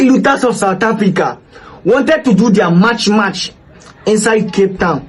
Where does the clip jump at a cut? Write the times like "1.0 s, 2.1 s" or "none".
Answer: none

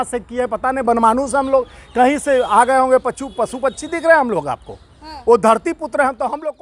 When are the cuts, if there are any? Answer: none

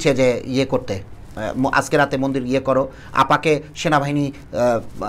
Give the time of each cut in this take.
none

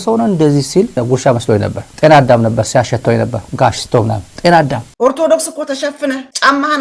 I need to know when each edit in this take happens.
1.9 s, 4.8 s

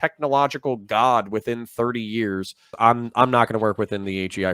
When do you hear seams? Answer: 2.7 s

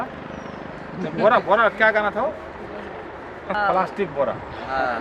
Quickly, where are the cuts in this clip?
3.5 s

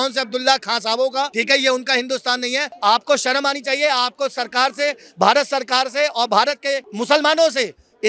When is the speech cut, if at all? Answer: 1.4 s, 2.7 s, 6.9 s

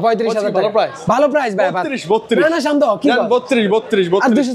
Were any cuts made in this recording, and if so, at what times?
none

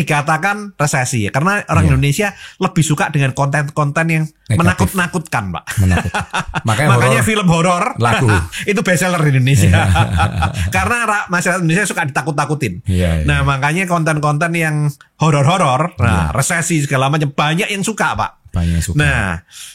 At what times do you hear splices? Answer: none

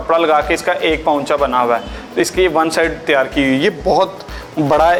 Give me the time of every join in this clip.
none

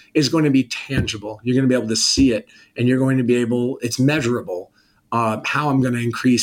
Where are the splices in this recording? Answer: none

